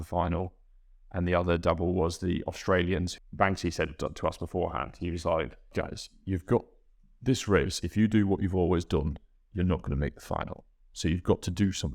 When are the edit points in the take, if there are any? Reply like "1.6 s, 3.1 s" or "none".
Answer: 3.1 s, 5.7 s